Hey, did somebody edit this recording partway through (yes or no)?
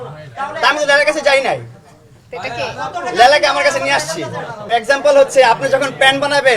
yes